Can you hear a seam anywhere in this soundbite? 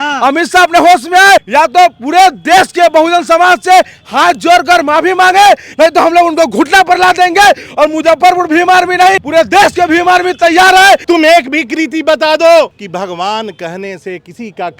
yes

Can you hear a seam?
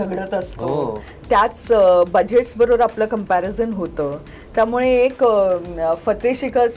no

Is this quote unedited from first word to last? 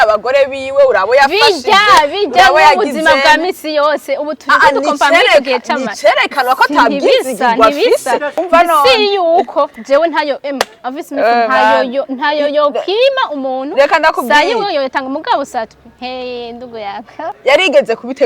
no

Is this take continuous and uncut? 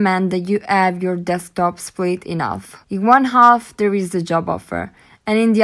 no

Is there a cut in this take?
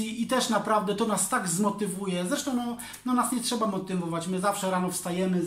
no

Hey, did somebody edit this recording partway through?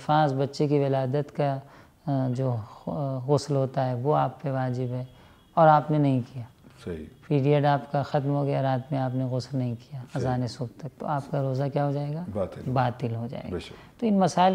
no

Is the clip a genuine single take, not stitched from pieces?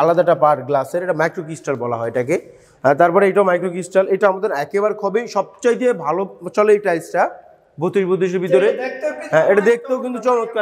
yes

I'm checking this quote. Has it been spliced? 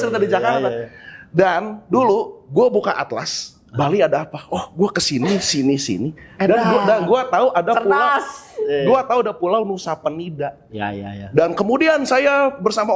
no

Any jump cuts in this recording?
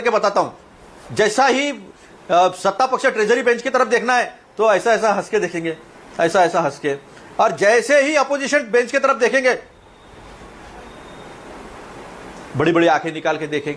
no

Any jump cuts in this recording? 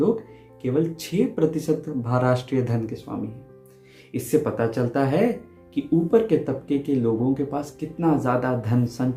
no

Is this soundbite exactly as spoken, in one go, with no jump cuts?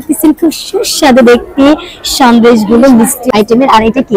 no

